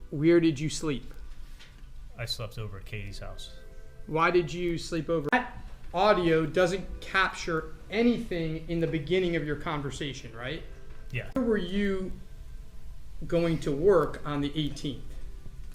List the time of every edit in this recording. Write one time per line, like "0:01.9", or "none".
0:05.3
0:11.4